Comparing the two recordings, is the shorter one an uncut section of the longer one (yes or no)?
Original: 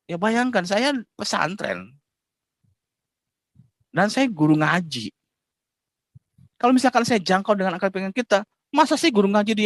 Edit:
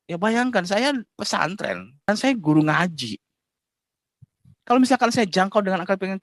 no